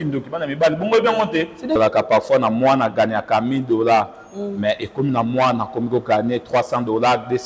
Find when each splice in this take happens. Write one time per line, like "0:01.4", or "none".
0:01.8